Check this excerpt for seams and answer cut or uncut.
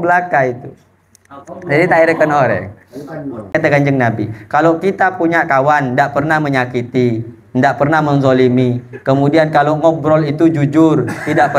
cut